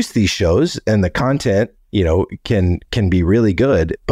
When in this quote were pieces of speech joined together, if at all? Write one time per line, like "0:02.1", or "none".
none